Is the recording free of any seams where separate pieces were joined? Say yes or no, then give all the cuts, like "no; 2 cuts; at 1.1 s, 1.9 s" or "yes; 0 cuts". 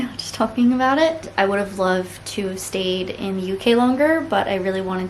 no; 1 cut; at 1.3 s